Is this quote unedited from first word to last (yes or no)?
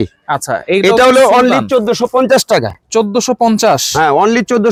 yes